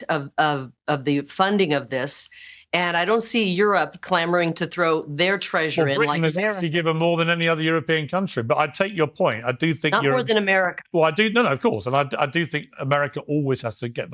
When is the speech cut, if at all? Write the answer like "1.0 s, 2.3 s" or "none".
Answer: none